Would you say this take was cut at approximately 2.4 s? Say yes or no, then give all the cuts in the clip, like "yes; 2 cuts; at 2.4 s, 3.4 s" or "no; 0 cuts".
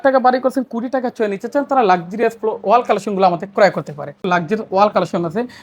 no; 1 cut; at 4.2 s